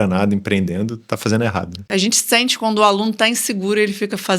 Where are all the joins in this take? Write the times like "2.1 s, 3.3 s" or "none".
1.9 s